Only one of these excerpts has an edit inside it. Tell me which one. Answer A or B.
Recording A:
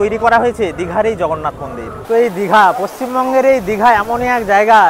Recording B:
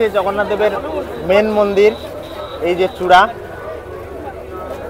A